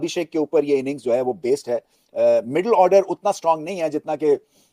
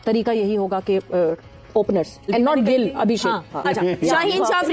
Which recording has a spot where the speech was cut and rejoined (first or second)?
second